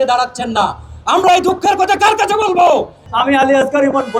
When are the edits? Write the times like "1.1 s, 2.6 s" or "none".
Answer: 3.0 s